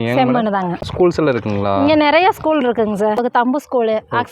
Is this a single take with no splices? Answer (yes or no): no